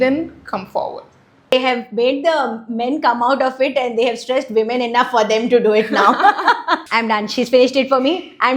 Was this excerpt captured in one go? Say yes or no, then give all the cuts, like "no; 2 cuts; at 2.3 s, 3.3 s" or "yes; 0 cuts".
no; 2 cuts; at 1.5 s, 6.8 s